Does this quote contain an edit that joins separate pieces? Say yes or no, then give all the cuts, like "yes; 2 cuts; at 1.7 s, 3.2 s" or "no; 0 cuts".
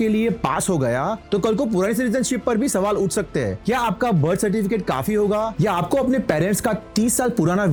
no; 0 cuts